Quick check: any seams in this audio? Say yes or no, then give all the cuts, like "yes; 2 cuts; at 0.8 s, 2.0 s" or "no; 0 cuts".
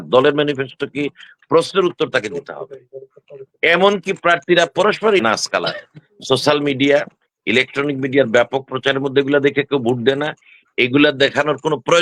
yes; 1 cut; at 5.2 s